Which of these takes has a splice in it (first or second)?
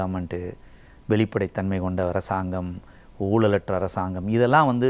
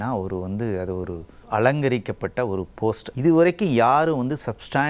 second